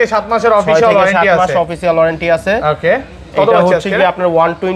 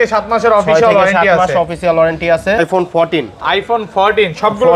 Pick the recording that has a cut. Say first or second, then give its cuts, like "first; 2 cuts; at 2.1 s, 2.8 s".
second; 1 cut; at 2.6 s